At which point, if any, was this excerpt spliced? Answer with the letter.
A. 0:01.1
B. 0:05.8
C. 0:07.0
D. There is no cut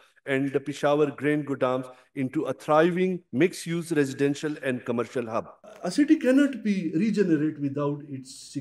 B